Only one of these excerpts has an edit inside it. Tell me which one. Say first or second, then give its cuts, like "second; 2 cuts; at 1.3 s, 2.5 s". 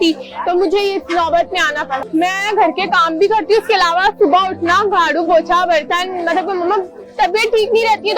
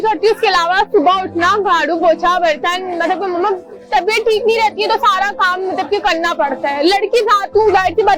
first; 1 cut; at 2.0 s